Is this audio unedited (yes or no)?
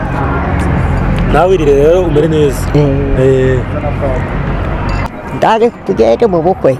no